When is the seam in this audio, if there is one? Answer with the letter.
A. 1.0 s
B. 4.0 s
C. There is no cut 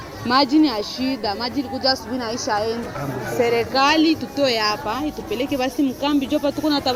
C